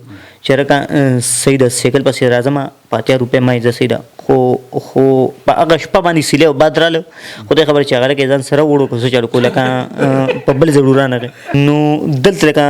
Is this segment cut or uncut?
cut